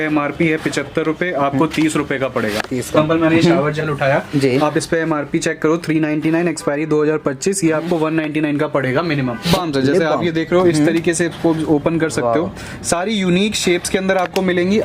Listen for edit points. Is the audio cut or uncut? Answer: cut